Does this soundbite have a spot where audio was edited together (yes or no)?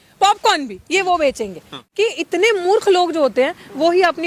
yes